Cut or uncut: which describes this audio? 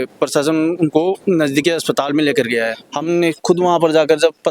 cut